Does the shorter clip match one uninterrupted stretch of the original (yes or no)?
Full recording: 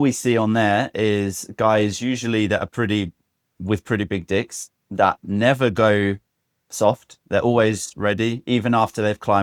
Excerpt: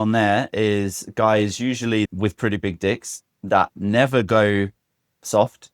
no